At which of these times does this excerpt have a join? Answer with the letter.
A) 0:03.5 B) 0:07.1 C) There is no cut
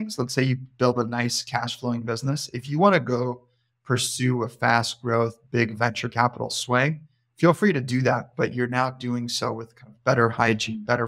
C